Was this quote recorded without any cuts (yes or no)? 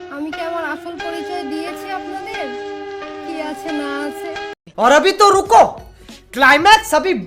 no